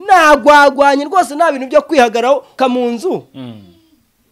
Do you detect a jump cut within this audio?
yes; 1 cut; at 2.6 s

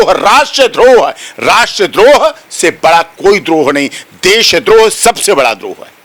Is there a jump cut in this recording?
no; 0 cuts

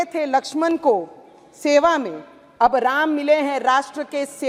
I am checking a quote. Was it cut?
no; 0 cuts

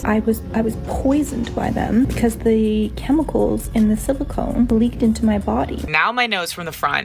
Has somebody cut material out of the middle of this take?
yes; 3 cuts; at 2.1 s, 4.7 s, 5.9 s

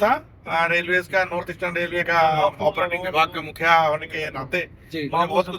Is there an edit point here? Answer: no; 0 cuts

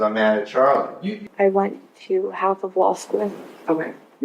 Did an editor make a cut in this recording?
yes; 1 cut; at 1.2 s

